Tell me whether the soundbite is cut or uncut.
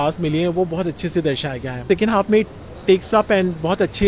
cut